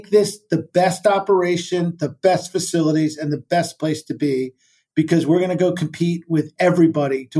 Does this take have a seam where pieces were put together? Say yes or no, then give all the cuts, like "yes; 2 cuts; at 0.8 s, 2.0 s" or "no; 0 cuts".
no; 0 cuts